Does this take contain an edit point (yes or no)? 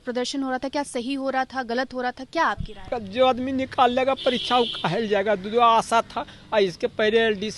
yes